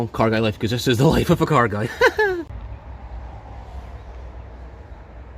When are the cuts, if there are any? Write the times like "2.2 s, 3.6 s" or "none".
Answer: 2.5 s